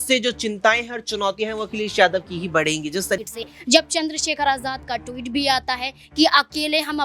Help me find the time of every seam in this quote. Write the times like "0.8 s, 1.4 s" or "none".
3.2 s